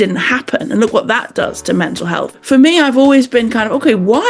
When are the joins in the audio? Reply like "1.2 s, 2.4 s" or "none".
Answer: 2.3 s